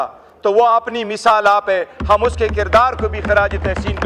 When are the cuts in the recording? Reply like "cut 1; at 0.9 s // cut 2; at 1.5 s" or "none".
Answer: none